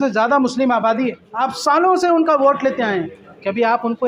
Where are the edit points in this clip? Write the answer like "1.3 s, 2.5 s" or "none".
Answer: 1.3 s